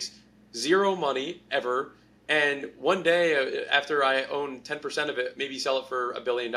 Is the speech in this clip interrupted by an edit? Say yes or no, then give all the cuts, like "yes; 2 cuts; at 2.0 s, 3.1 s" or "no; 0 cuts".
no; 0 cuts